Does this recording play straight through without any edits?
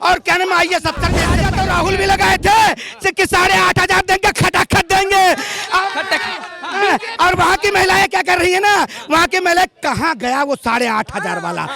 no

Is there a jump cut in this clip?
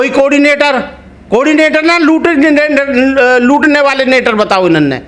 no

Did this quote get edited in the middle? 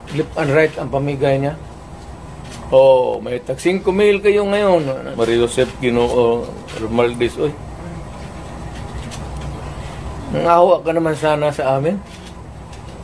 yes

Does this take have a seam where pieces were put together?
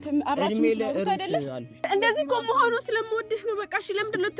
yes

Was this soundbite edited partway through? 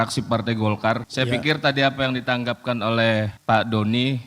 yes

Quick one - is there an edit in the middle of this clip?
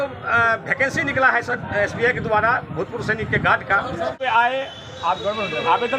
yes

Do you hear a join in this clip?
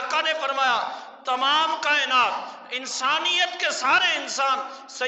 no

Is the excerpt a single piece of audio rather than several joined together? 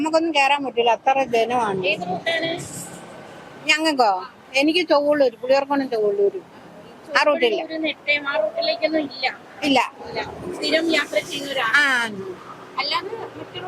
yes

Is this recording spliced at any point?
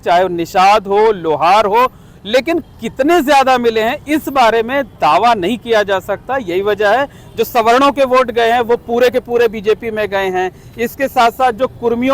no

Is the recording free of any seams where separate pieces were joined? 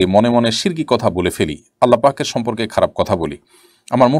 yes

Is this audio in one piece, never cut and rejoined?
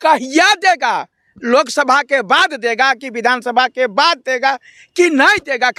yes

